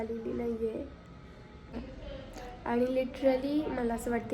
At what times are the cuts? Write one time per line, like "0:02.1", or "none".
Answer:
0:01.5